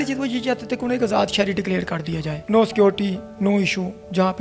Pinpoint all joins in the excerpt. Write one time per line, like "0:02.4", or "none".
none

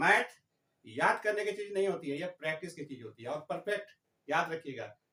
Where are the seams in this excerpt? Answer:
none

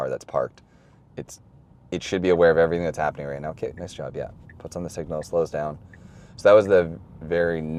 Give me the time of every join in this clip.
none

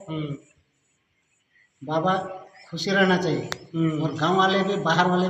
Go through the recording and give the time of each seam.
none

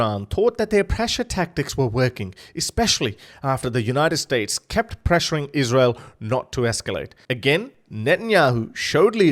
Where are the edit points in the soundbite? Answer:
none

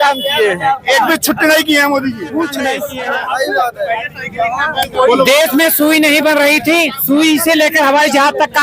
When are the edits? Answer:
0:02.9

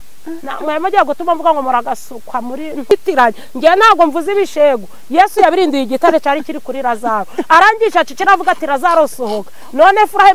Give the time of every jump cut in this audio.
0:02.9

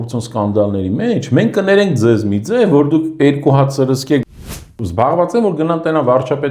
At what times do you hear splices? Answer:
0:04.2

